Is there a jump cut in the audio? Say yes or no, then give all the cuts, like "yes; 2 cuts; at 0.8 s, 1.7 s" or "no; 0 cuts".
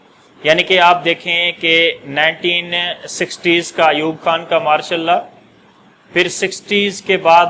no; 0 cuts